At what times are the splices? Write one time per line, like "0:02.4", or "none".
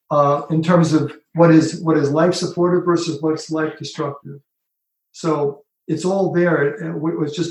none